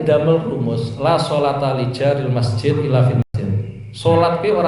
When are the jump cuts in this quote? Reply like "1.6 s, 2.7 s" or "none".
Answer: 3.3 s